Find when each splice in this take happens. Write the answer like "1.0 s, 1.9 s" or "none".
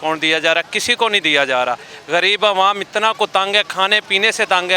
none